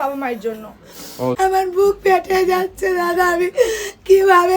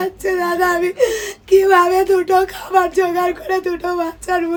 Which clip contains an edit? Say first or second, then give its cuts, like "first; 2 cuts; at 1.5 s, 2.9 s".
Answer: first; 1 cut; at 1.4 s